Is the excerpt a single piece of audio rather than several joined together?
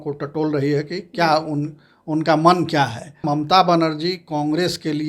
no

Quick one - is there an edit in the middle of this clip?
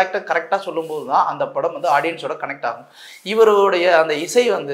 no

